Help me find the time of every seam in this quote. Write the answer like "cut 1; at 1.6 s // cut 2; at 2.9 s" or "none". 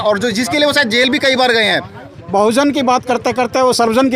cut 1; at 2.0 s